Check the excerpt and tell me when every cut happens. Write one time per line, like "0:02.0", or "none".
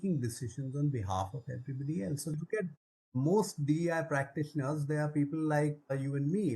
0:02.3